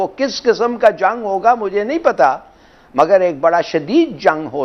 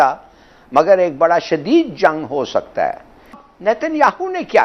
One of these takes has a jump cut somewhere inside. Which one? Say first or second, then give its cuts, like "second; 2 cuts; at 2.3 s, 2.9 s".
second; 1 cut; at 3.4 s